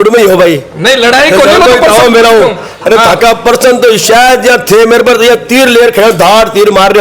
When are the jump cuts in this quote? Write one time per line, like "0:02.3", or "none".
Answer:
none

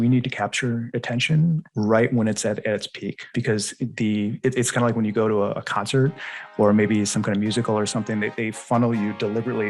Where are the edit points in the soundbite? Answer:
0:03.3

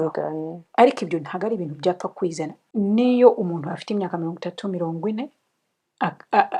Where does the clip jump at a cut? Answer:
0:02.6

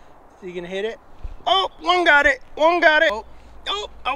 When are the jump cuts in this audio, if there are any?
0:03.2

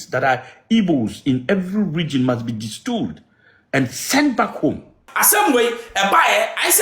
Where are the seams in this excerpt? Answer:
0:05.0

